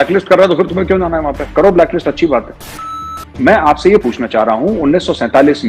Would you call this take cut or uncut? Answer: cut